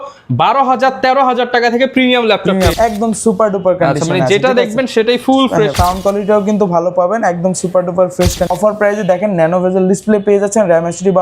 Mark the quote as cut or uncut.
cut